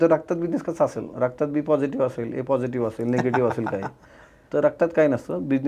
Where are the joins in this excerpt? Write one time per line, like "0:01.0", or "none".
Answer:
none